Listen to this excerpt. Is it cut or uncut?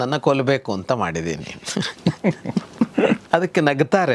cut